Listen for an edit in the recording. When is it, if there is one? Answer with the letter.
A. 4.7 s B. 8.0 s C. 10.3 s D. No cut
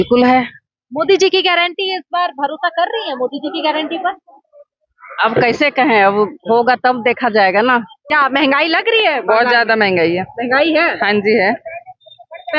B